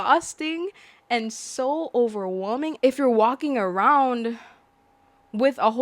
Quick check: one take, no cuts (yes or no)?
no